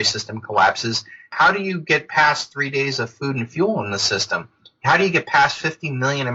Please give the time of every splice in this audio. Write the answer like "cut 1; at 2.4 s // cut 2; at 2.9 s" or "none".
none